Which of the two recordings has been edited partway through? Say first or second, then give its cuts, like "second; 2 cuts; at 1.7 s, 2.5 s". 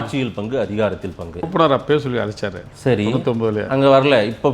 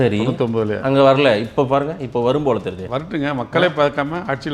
first; 1 cut; at 1.5 s